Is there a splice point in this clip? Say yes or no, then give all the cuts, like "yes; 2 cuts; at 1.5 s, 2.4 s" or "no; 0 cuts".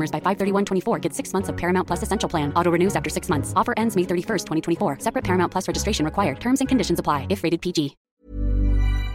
yes; 1 cut; at 8.0 s